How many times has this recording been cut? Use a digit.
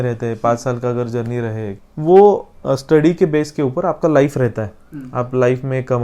1